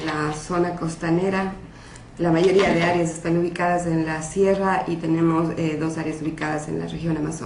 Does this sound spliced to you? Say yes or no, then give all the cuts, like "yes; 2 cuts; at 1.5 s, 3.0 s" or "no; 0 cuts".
no; 0 cuts